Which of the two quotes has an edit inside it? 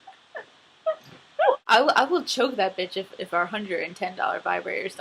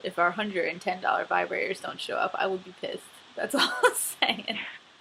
first; 1 cut; at 1.6 s

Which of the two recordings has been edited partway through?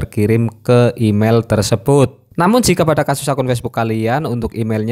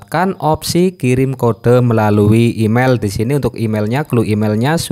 first; 1 cut; at 2.2 s

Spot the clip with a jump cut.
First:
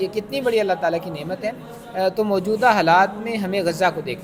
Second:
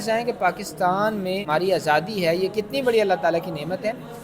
second; 1 cut; at 1.5 s

